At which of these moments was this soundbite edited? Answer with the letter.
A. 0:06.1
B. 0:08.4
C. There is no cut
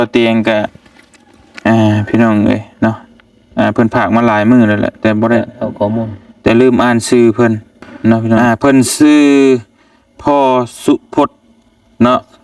B